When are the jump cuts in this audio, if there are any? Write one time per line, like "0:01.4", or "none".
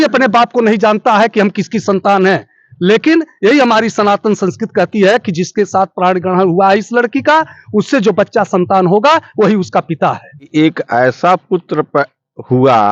0:10.5